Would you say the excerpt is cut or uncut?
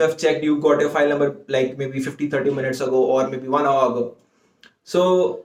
uncut